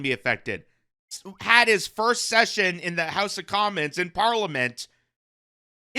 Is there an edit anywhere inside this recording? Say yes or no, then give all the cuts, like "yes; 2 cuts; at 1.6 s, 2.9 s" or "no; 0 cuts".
yes; 1 cut; at 1.2 s